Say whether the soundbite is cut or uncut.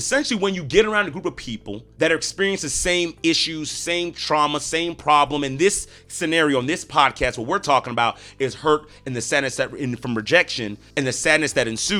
uncut